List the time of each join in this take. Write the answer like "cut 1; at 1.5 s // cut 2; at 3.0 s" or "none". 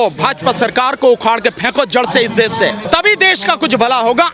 cut 1; at 2.8 s